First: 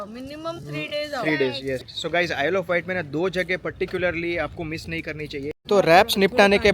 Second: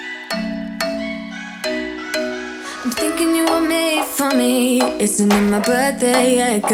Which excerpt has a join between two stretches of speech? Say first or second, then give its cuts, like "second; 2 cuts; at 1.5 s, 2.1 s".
first; 2 cuts; at 1.9 s, 5.5 s